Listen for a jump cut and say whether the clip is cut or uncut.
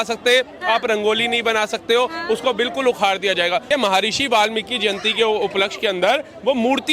cut